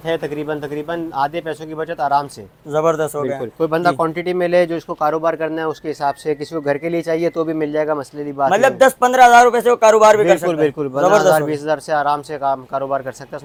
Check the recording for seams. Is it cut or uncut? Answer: uncut